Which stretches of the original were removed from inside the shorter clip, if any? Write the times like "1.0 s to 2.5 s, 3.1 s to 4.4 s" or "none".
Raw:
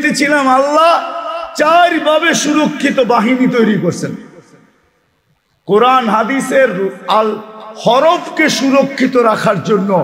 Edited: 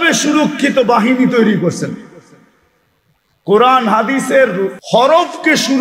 7.0 s to 7.7 s